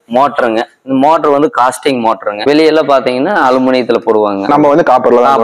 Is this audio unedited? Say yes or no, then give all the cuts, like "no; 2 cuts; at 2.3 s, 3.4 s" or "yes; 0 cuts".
yes; 0 cuts